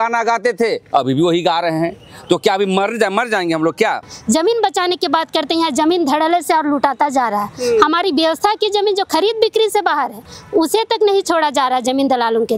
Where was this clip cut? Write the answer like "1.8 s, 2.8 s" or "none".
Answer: 4.1 s